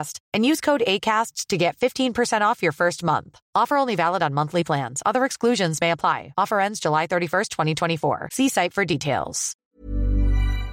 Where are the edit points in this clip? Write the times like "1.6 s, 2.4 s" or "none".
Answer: 9.7 s